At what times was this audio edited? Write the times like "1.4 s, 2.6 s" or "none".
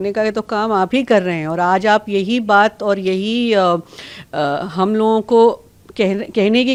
none